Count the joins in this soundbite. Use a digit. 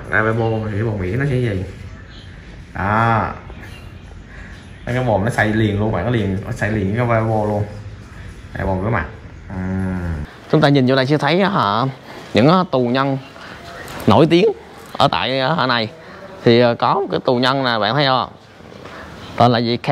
0